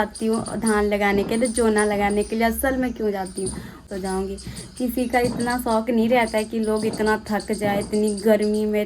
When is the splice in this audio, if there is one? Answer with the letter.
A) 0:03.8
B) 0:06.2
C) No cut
A